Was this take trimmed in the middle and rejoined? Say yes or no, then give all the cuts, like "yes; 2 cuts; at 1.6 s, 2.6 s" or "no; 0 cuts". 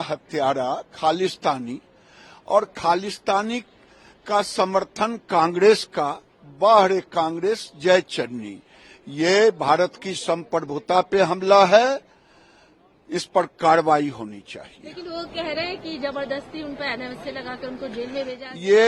no; 0 cuts